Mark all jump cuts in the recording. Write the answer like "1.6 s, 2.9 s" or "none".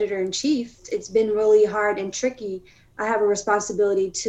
0.9 s